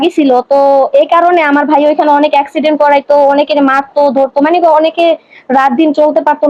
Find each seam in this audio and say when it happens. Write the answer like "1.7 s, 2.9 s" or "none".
none